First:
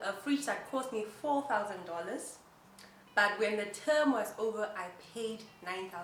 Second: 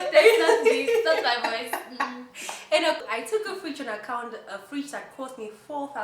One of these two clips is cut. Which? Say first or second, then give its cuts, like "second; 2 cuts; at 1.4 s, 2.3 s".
second; 1 cut; at 3.0 s